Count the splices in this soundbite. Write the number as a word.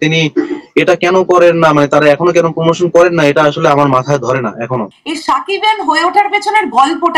one